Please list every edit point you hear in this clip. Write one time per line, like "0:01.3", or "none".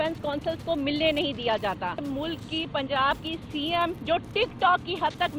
0:02.1
0:04.0